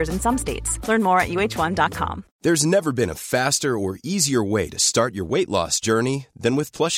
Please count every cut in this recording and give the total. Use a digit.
1